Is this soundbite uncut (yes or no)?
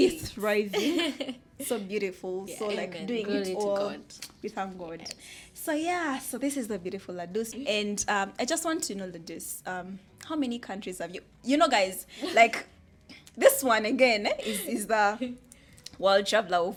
yes